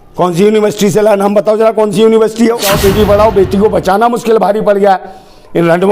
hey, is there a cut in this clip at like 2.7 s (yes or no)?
yes